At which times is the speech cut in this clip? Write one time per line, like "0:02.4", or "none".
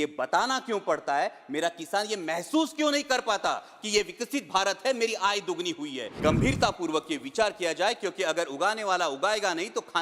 0:06.1